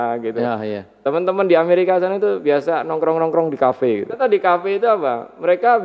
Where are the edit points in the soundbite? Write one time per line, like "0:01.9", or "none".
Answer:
0:04.1